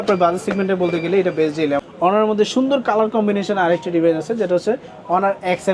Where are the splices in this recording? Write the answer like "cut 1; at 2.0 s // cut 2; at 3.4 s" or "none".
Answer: cut 1; at 1.9 s

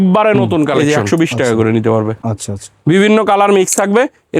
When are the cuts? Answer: cut 1; at 1.1 s

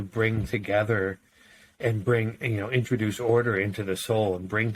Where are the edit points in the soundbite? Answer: none

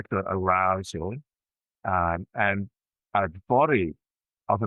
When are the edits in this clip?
none

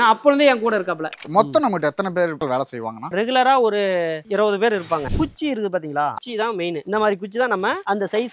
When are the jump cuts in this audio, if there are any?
cut 1; at 1.2 s // cut 2; at 5.1 s

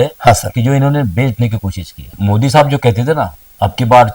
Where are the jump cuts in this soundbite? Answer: cut 1; at 2.1 s

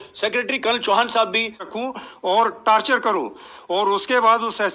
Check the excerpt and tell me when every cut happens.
cut 1; at 1.6 s

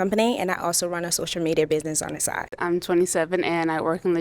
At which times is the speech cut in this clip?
cut 1; at 2.5 s

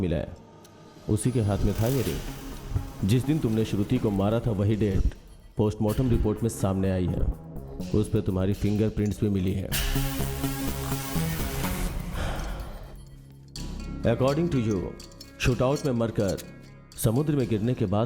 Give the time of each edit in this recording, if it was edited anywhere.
none

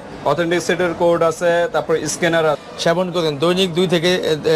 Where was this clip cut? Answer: cut 1; at 2.6 s

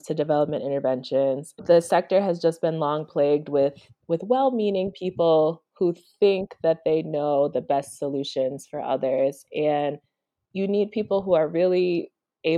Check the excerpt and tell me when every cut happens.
none

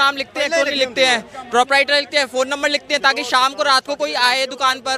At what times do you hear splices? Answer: none

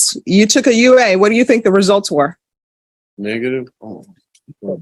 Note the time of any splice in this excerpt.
none

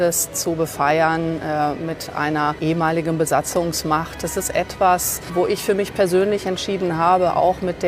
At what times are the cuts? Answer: cut 1; at 2.6 s // cut 2; at 5.2 s

